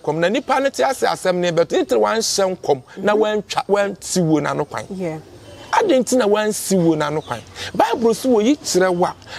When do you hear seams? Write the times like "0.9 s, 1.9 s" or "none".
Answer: none